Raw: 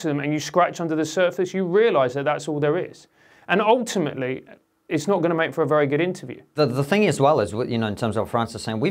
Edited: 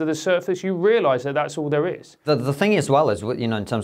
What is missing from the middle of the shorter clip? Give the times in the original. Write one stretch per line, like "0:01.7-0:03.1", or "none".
0:03.0-0:06.4